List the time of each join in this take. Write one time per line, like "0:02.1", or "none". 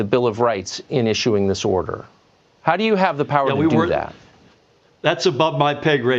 none